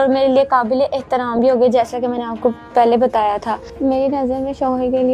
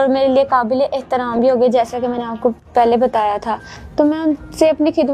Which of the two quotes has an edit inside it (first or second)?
first